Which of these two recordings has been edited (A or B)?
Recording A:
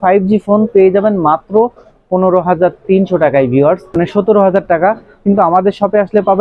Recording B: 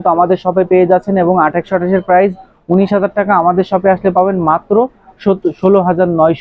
A